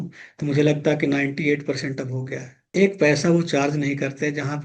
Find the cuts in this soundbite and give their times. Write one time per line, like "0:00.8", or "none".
0:02.7